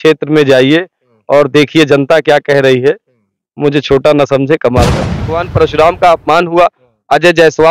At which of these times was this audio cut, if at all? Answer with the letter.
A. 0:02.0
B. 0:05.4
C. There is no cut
B